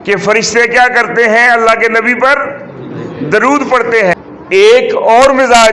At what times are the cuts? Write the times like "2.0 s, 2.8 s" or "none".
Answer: 4.2 s